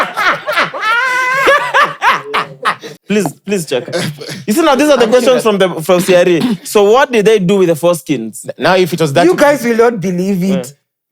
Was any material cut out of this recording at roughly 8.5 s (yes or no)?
no